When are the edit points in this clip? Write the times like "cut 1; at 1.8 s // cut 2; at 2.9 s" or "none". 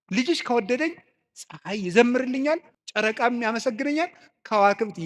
cut 1; at 2.8 s